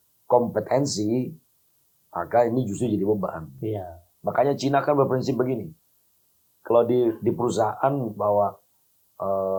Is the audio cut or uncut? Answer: uncut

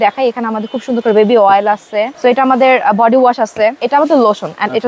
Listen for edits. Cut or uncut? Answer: cut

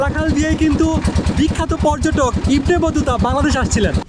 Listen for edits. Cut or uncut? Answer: uncut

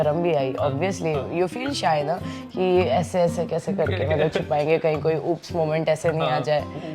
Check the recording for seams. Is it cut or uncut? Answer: uncut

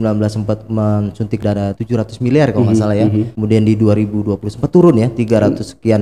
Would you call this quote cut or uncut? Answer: cut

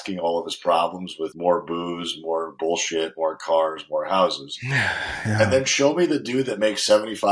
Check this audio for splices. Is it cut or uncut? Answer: cut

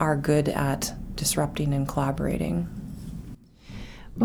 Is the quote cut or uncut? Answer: uncut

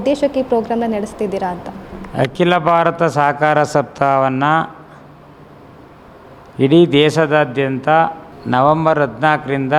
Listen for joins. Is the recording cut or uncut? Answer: uncut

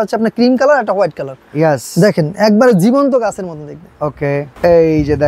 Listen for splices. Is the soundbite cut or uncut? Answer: uncut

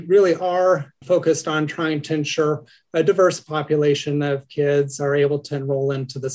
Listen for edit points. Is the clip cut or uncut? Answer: cut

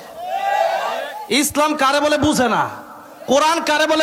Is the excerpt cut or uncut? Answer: uncut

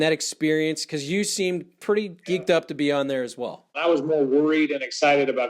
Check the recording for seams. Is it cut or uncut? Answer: cut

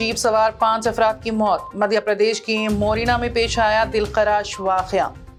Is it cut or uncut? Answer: uncut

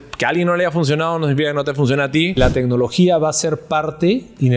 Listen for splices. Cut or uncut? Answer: cut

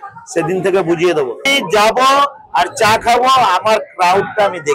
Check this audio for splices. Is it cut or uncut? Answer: cut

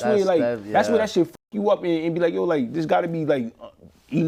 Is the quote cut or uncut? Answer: uncut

